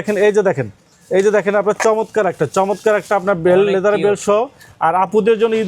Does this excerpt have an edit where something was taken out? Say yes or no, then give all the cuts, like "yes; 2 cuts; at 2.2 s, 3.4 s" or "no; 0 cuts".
no; 0 cuts